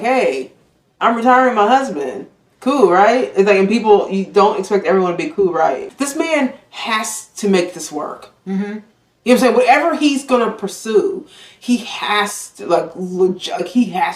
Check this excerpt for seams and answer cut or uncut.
cut